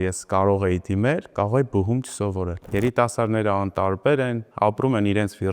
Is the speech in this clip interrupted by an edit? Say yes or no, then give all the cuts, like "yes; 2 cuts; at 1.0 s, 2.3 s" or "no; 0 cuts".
yes; 1 cut; at 2.6 s